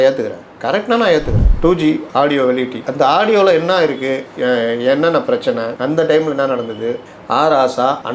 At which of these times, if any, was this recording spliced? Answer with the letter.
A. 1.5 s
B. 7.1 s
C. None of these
A